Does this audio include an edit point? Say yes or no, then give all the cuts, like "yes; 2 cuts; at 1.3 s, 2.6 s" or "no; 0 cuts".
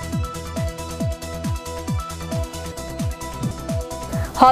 no; 0 cuts